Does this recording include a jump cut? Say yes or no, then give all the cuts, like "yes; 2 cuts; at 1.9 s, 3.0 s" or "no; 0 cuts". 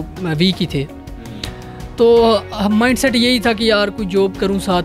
no; 0 cuts